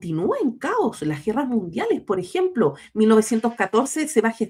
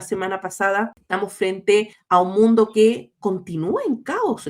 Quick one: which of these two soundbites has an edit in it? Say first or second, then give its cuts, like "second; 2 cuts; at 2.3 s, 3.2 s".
second; 2 cuts; at 1.0 s, 2.0 s